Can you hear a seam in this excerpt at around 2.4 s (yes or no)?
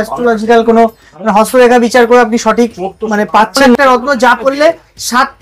no